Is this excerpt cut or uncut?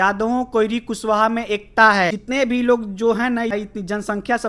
cut